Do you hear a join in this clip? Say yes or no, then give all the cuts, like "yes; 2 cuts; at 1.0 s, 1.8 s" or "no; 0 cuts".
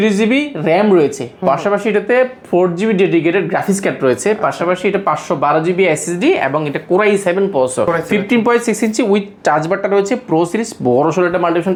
no; 0 cuts